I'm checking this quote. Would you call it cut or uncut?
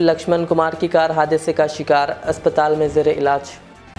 uncut